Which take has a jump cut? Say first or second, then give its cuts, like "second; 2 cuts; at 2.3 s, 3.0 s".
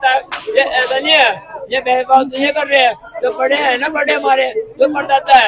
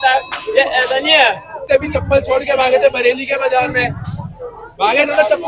second; 1 cut; at 1.6 s